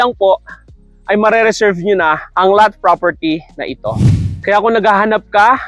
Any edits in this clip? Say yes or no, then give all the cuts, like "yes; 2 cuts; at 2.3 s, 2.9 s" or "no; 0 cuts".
yes; 1 cut; at 4.3 s